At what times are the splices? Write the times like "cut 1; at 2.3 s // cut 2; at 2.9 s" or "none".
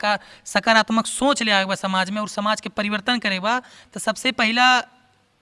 none